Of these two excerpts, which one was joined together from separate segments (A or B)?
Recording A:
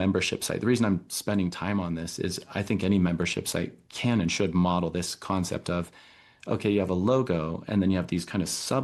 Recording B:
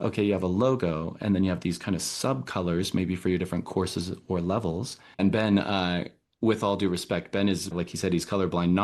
B